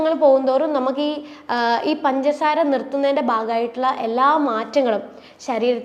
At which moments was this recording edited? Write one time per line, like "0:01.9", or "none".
none